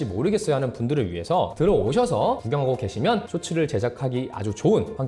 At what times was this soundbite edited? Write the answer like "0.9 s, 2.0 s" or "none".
1.5 s